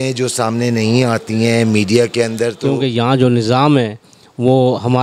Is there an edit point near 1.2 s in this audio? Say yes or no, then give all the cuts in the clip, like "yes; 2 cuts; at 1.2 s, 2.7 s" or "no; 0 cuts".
no; 1 cut; at 2.6 s